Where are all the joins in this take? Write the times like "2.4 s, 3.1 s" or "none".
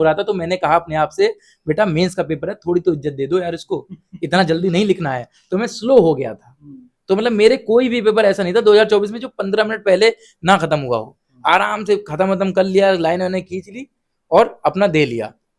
none